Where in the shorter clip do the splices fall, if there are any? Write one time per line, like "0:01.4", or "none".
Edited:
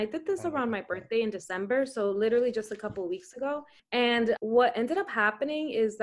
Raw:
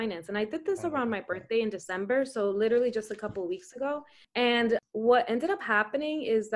0:04.2